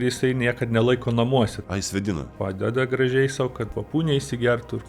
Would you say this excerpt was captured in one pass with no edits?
no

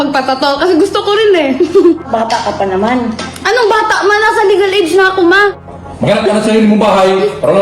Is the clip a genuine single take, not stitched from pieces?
no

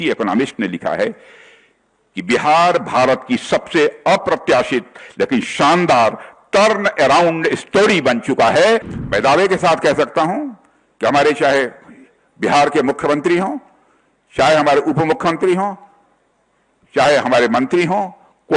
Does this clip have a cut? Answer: yes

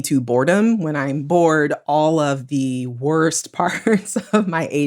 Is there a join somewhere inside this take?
no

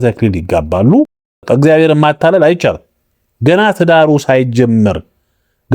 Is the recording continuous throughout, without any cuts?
no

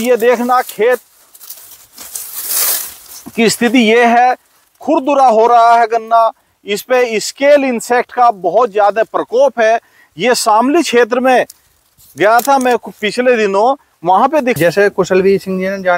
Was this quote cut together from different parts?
yes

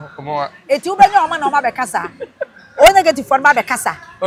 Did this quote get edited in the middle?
no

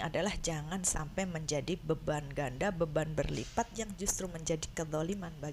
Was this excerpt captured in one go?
yes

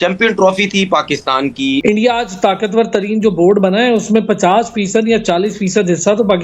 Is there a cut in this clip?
yes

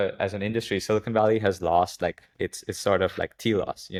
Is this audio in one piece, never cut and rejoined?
yes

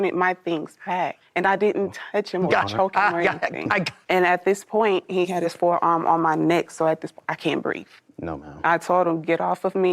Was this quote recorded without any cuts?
no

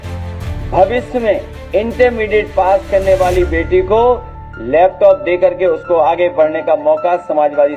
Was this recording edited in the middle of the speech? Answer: yes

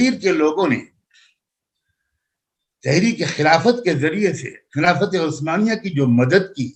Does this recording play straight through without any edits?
yes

